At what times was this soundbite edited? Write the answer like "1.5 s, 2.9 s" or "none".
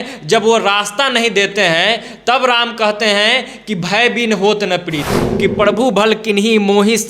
5.2 s